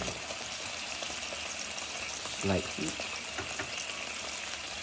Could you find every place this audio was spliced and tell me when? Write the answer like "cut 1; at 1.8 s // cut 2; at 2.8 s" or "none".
none